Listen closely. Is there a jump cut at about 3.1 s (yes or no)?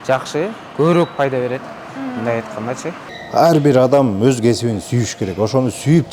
yes